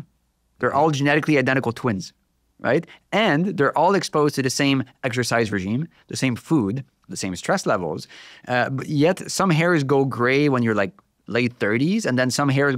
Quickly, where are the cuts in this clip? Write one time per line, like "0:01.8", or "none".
none